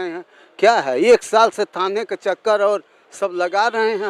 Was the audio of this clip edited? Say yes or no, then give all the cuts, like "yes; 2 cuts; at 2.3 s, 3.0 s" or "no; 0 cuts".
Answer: no; 0 cuts